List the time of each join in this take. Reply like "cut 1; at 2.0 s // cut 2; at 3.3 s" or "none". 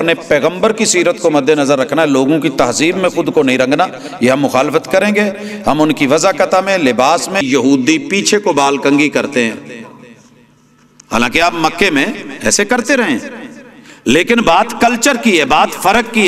cut 1; at 7.5 s